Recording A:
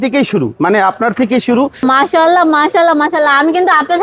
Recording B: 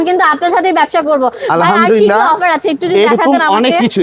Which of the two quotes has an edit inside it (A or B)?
A